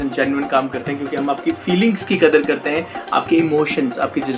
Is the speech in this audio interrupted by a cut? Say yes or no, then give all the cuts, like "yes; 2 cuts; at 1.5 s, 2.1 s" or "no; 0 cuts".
no; 0 cuts